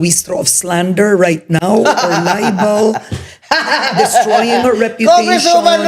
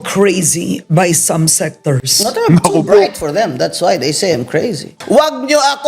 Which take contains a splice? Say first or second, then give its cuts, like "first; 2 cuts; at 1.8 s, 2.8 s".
second; 1 cut; at 4.9 s